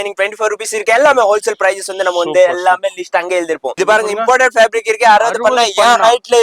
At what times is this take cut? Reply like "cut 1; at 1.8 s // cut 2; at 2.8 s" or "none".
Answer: cut 1; at 3.7 s